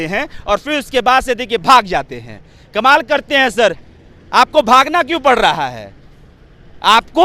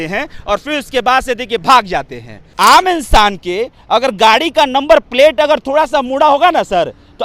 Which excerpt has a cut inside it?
second; 1 cut; at 2.4 s

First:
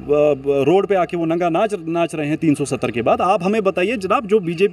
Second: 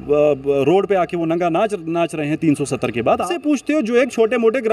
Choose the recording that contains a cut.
second; 1 cut; at 3.3 s

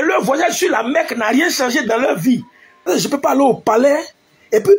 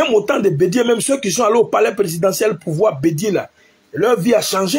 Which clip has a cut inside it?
first; 1 cut; at 2.9 s

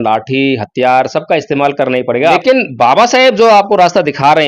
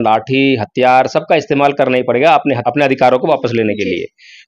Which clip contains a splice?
first; 1 cut; at 2.4 s

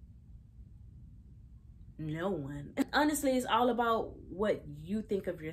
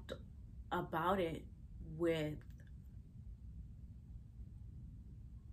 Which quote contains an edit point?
first; 1 cut; at 2.8 s

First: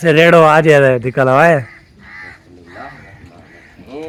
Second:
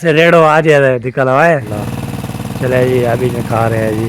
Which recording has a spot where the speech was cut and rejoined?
second; 1 cut; at 1.7 s

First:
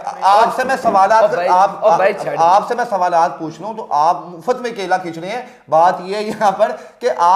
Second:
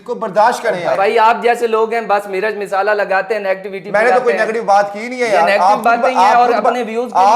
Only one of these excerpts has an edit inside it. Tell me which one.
second; 1 cut; at 1.0 s

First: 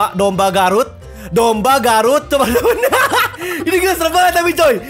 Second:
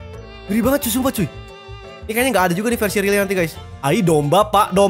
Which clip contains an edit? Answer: second; 1 cut; at 3.6 s

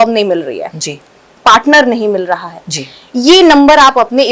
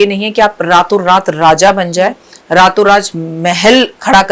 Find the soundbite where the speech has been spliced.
first; 1 cut; at 1.2 s

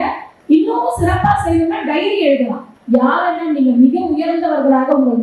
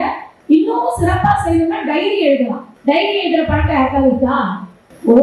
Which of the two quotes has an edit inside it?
first; 1 cut; at 2.7 s

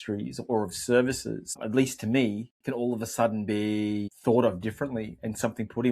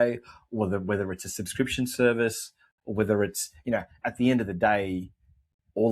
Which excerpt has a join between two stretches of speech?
first; 2 cuts; at 1.6 s, 4.1 s

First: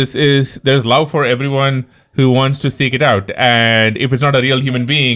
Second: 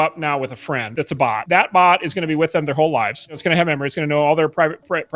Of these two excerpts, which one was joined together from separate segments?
second; 2 cuts; at 1.2 s, 3.4 s

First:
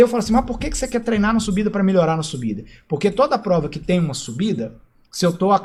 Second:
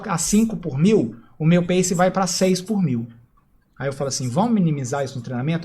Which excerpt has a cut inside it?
second; 2 cuts; at 1.2 s, 3.4 s

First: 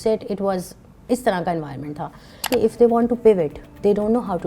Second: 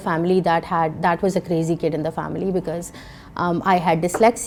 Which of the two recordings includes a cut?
first; 1 cut; at 2.5 s

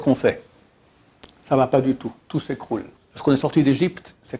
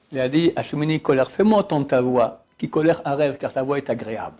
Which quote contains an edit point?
first; 1 cut; at 3.0 s

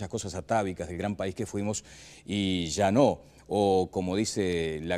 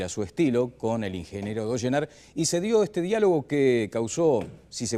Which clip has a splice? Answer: first; 1 cut; at 1.9 s

